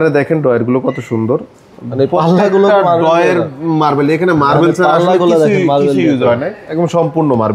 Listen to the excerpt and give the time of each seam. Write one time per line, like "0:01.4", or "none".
none